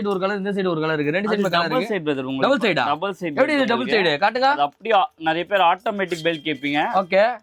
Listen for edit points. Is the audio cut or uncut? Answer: uncut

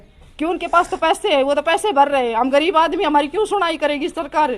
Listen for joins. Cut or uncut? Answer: uncut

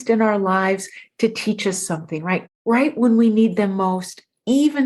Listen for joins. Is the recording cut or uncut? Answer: cut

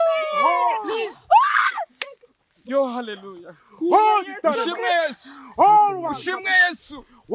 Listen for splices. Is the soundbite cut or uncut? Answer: uncut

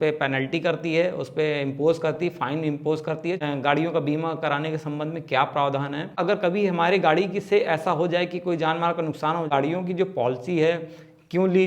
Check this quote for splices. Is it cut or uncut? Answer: cut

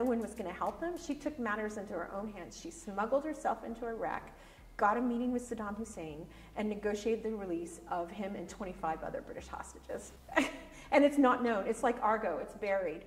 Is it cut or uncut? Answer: uncut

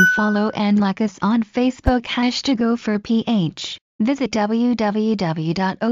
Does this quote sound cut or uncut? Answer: cut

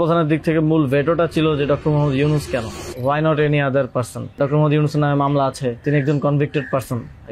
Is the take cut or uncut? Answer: cut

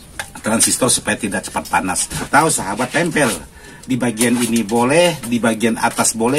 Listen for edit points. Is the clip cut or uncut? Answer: cut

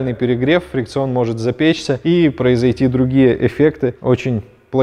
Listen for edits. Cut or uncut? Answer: uncut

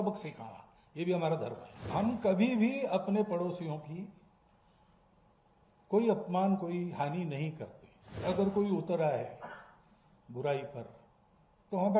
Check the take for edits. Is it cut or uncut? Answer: cut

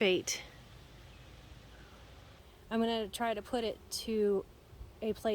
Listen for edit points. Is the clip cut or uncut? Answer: cut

